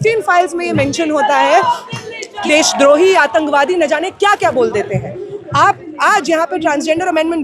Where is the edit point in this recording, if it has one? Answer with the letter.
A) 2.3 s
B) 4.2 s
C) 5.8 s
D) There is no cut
A